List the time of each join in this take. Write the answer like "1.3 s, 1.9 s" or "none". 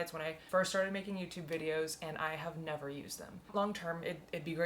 3.5 s